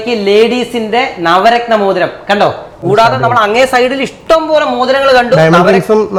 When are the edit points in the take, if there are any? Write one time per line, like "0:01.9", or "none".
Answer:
none